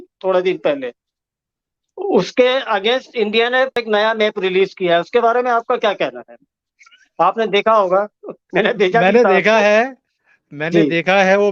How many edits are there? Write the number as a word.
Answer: zero